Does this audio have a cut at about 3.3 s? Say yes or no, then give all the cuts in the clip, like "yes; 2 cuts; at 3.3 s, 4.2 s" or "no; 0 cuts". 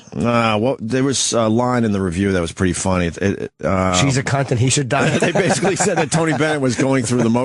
yes; 1 cut; at 3.3 s